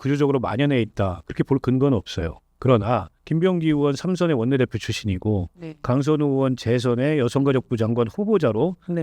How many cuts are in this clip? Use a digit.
1